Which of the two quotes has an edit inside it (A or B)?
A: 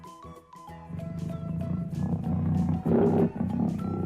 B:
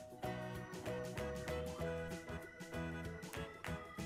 A